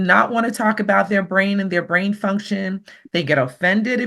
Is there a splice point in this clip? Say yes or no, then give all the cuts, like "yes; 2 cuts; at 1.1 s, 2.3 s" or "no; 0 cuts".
no; 0 cuts